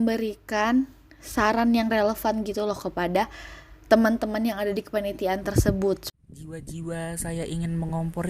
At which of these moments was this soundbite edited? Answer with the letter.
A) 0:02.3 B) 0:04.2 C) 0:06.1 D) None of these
C